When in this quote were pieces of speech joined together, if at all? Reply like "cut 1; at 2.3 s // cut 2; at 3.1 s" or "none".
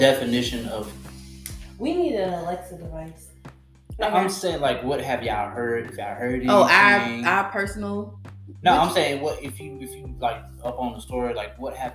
none